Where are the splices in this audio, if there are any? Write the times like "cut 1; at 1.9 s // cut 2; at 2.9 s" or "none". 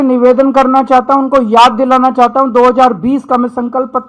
none